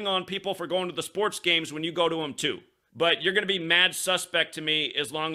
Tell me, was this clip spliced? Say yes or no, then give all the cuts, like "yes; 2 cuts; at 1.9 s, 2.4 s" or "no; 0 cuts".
yes; 1 cut; at 2.7 s